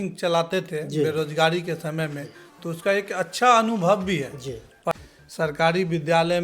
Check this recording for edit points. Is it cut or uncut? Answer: cut